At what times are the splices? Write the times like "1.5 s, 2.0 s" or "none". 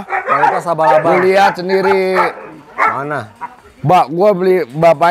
none